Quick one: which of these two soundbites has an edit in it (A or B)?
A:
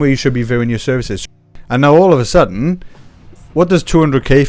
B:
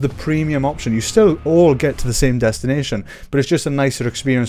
A